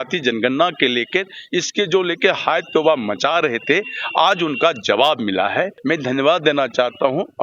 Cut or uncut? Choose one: cut